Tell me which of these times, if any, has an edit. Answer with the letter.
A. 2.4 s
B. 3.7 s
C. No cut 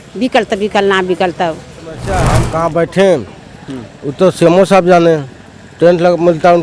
A